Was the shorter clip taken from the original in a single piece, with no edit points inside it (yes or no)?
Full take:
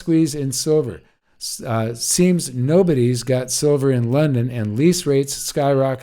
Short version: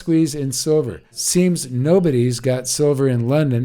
no